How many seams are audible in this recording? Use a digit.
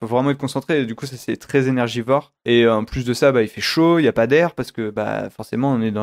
0